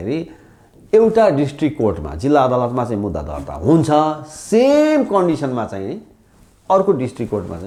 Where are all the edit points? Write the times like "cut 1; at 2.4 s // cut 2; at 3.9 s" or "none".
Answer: none